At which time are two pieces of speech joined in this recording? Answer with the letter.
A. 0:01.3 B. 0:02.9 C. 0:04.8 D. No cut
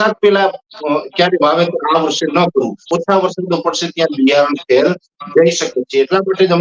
B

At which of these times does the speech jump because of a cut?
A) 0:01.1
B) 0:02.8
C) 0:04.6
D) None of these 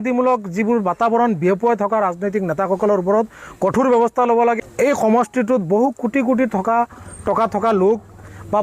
C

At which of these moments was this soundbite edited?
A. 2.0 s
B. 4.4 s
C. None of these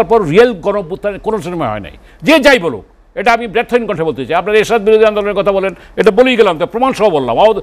C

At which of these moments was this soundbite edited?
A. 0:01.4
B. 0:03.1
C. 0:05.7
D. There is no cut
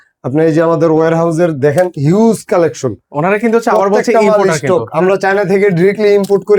D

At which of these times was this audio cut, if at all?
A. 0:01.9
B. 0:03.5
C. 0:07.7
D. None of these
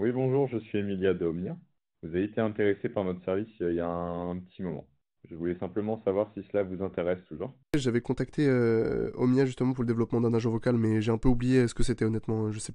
C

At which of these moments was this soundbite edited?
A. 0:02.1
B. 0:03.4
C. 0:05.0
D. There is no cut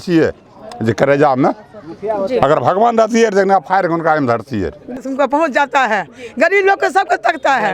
C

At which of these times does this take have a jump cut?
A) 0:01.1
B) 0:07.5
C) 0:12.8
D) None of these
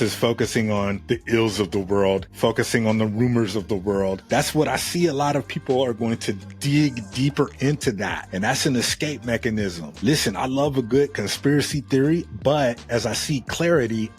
C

